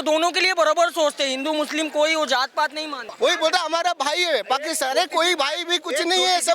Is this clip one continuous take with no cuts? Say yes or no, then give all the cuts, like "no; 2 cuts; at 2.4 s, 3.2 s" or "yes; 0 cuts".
no; 1 cut; at 3.1 s